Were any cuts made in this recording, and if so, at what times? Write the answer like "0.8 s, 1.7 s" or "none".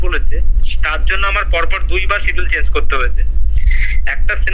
none